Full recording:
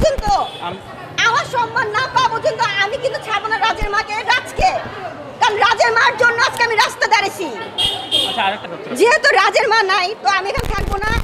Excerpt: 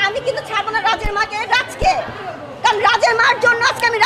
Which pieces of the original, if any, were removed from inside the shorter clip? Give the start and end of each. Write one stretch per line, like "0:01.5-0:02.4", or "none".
none